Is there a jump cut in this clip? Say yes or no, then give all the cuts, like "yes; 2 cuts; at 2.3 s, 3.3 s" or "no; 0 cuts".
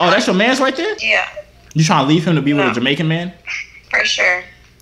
yes; 1 cut; at 1.0 s